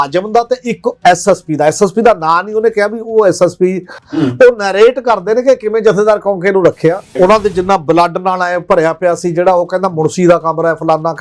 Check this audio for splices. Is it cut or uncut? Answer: cut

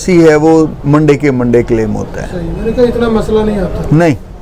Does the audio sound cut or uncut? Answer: uncut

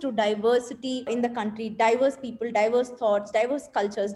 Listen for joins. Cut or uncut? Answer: cut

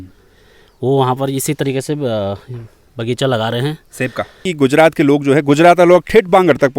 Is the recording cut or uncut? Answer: cut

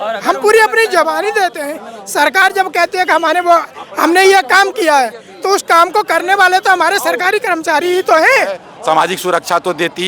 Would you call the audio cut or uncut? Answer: cut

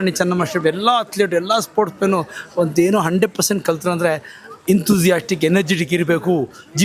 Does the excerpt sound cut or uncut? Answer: uncut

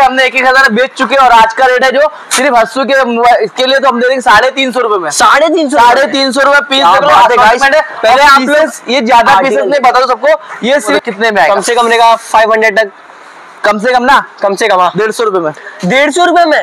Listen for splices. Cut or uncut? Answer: cut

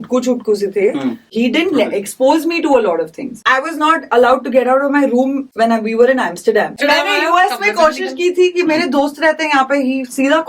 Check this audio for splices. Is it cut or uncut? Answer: cut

